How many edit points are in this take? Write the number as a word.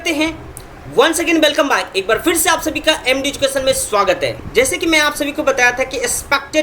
one